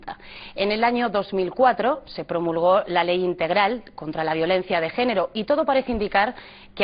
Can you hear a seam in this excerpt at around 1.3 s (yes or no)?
yes